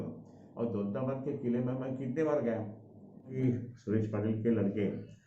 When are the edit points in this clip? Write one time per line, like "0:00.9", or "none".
0:03.3

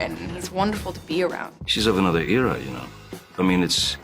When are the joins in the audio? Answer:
0:01.5

